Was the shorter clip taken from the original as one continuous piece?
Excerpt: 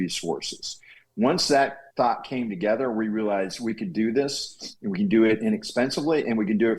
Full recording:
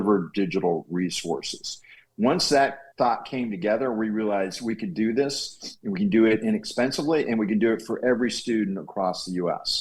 yes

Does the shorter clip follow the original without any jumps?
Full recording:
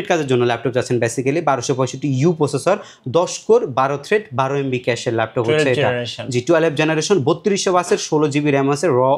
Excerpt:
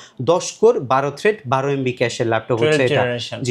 yes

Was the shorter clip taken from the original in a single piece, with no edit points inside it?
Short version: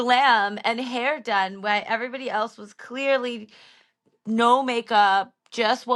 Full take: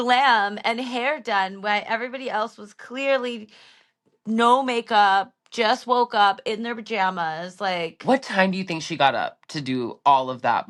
yes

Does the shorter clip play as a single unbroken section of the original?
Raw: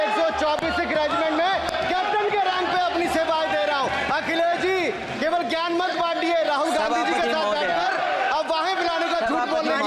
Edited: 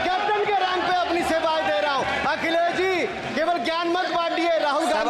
yes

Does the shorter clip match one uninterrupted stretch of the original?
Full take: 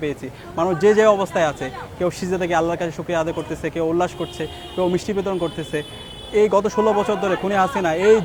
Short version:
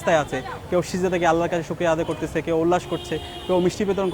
yes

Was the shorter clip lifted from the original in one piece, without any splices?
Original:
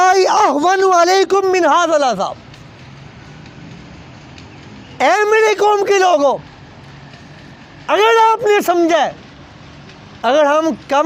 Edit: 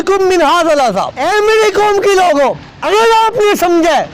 no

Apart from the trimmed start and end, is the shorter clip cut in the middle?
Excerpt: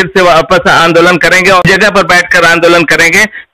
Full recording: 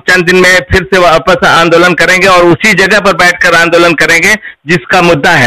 yes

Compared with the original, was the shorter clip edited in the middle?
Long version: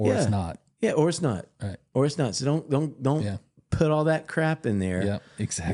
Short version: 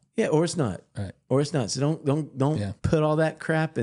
yes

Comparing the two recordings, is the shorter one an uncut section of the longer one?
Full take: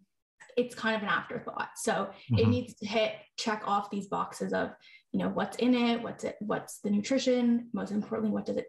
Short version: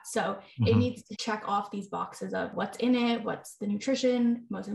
no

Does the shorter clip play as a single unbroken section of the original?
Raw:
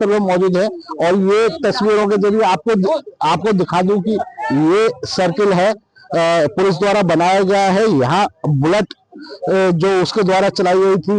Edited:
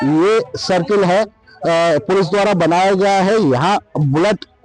yes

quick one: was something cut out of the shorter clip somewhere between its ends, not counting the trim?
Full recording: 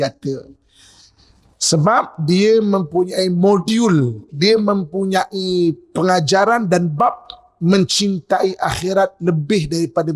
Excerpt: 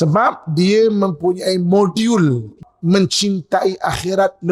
yes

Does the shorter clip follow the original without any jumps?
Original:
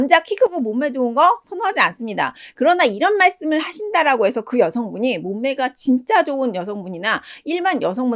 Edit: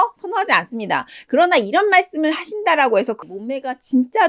no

